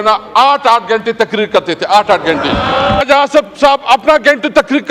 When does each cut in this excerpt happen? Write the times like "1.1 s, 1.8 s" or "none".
3.0 s